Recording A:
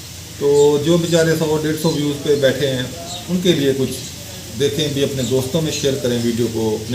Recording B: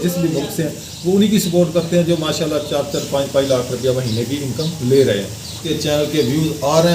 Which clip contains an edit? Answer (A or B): B